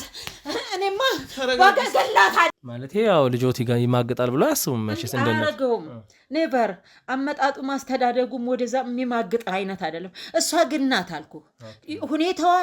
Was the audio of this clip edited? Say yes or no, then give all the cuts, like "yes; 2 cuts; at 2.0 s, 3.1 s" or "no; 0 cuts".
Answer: yes; 1 cut; at 2.5 s